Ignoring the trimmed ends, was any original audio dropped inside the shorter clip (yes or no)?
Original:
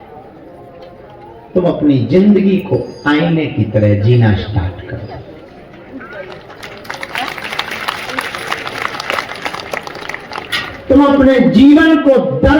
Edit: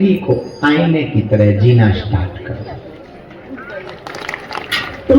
yes